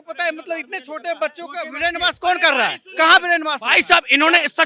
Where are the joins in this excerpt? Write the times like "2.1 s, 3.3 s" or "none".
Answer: none